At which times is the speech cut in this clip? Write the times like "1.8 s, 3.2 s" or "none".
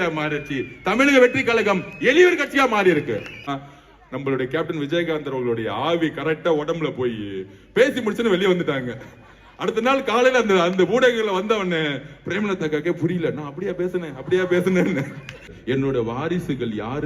3.5 s, 15.5 s